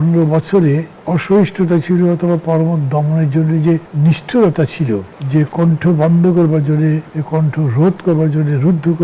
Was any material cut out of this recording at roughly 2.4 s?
no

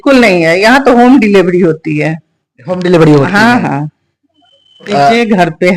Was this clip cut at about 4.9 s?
yes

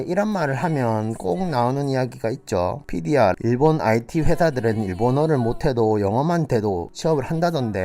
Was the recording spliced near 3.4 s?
yes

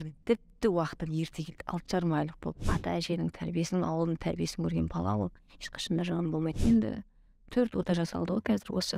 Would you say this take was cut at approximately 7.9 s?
no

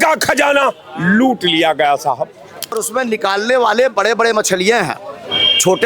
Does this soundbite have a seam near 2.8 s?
yes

